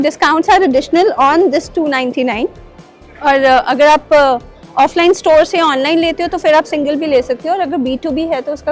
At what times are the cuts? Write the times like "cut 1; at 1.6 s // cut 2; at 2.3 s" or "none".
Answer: none